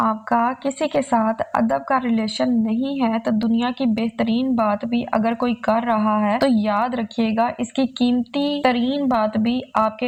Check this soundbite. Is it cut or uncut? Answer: uncut